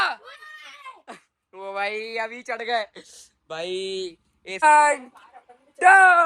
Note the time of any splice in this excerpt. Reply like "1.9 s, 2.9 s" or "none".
4.6 s